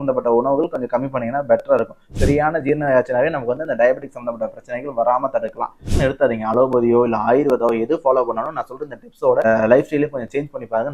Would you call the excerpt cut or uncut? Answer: cut